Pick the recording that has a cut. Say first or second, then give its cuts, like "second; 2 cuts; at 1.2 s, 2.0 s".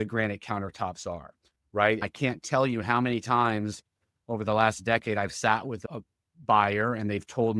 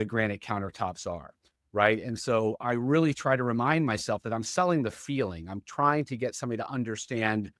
first; 1 cut; at 2.1 s